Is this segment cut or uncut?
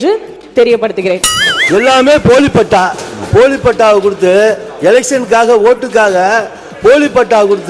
cut